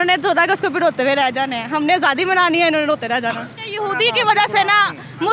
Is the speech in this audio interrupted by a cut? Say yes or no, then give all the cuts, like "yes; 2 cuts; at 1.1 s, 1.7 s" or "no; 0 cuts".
yes; 1 cut; at 3.8 s